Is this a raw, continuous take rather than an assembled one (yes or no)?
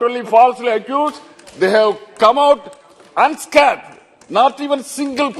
yes